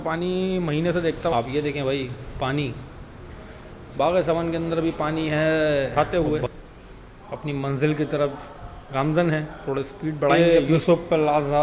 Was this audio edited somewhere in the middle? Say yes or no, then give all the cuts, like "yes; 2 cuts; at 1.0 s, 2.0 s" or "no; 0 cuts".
yes; 3 cuts; at 1.3 s, 5.9 s, 10.3 s